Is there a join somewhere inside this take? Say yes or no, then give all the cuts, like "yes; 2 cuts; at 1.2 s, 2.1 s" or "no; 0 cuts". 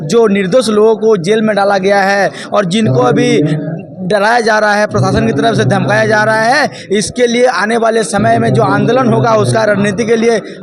no; 0 cuts